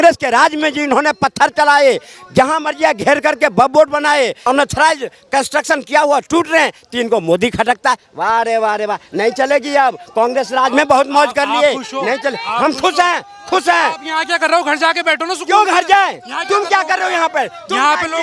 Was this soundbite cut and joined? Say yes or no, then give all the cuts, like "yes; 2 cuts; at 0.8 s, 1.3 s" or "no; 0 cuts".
no; 0 cuts